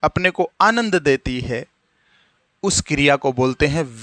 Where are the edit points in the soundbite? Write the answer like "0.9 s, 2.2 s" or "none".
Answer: none